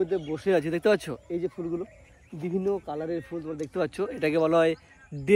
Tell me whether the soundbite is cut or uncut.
uncut